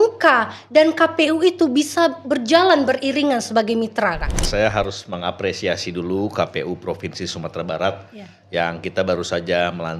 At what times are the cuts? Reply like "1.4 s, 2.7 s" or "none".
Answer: 4.5 s

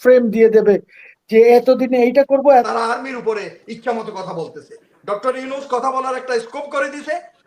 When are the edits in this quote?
2.6 s

